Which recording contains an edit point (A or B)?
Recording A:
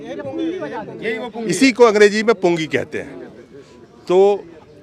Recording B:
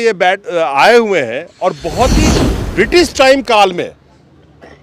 B